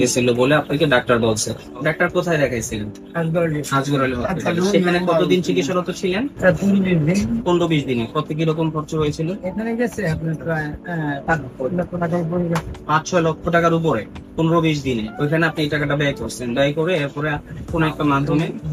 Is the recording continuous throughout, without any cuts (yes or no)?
yes